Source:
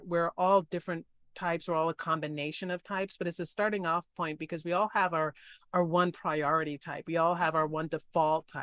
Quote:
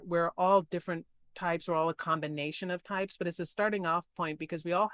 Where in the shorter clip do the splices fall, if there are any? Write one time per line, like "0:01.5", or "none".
none